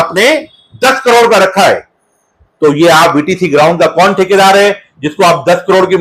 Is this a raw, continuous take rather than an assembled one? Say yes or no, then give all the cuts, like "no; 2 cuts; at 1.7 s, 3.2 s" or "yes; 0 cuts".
yes; 0 cuts